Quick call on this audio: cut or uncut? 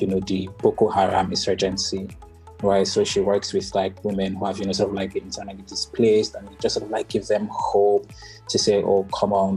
uncut